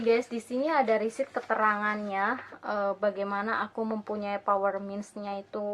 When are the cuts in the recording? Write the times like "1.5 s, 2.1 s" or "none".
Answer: none